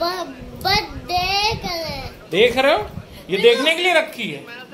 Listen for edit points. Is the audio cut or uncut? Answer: cut